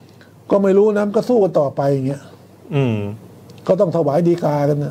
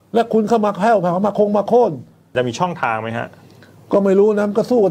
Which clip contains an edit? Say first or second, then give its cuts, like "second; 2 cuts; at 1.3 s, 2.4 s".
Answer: second; 1 cut; at 2.3 s